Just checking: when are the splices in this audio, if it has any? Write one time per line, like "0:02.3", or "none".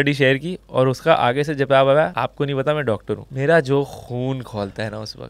0:02.1
0:03.3